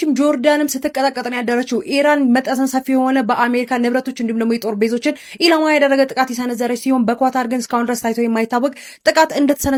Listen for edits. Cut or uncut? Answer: uncut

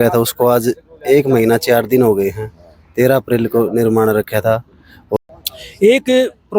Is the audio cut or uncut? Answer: cut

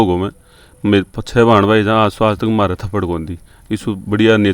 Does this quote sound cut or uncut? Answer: uncut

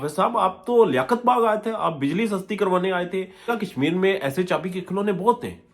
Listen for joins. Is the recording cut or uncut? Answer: cut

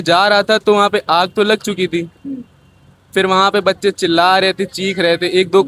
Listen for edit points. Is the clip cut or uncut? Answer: uncut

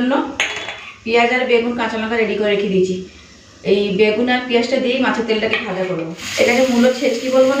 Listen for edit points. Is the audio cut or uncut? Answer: cut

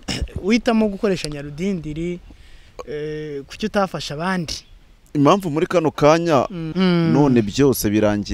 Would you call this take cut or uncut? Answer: cut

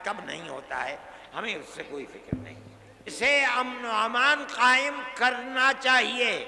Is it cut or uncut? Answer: cut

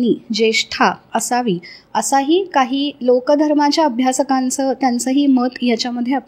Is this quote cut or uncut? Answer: uncut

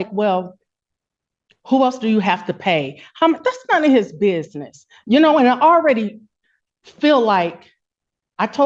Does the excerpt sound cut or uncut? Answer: uncut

